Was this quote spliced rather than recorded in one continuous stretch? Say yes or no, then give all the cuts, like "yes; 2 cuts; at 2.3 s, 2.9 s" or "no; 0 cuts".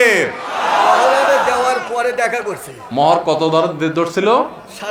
no; 0 cuts